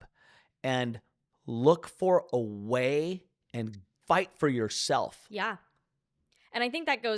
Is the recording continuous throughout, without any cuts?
no; 1 cut; at 3.9 s

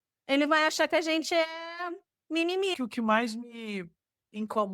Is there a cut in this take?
yes; 1 cut; at 2.8 s

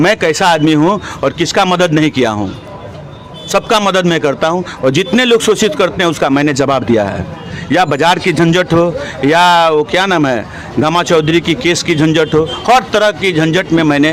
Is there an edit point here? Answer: no; 0 cuts

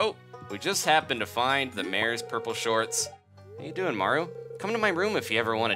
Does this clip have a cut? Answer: yes; 1 cut; at 3.2 s

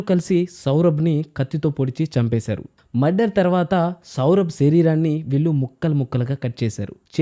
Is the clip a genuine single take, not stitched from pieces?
no; 1 cut; at 2.8 s

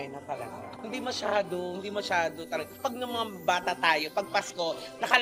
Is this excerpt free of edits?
no; 1 cut; at 2.8 s

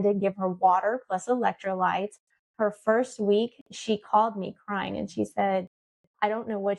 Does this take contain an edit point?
no; 0 cuts

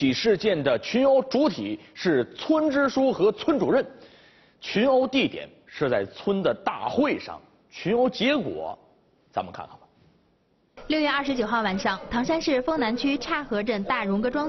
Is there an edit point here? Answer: no; 0 cuts

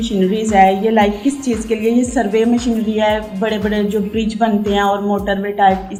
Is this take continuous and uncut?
yes; 0 cuts

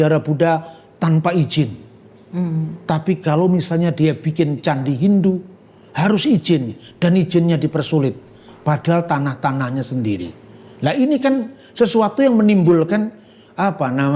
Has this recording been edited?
no; 0 cuts

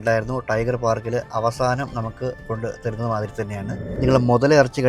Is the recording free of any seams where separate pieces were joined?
no; 1 cut; at 3.9 s

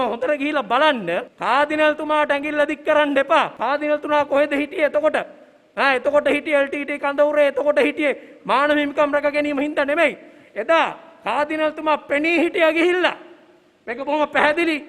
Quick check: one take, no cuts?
no; 2 cuts; at 1.3 s, 3.6 s

